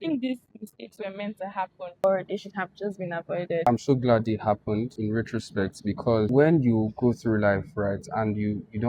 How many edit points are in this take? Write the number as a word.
three